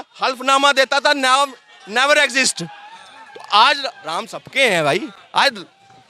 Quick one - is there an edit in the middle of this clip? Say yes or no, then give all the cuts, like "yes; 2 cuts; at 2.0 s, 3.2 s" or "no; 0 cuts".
no; 0 cuts